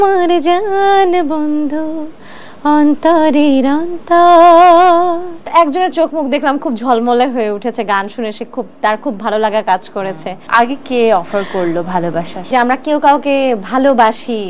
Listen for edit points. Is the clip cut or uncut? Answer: cut